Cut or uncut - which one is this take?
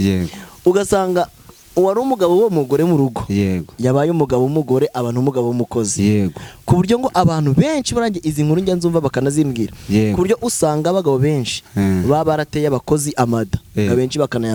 uncut